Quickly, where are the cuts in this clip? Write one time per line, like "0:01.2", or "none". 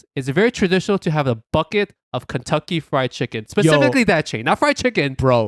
none